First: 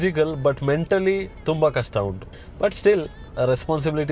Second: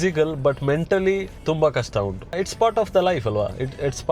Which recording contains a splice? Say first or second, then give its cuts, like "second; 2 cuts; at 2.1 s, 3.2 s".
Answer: second; 1 cut; at 2.4 s